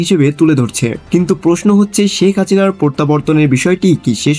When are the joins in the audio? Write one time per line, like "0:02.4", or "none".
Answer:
0:01.0